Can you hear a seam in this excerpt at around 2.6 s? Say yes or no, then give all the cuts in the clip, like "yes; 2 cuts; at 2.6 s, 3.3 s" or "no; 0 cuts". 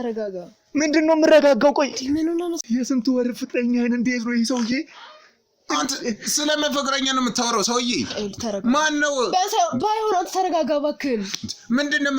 yes; 1 cut; at 2.6 s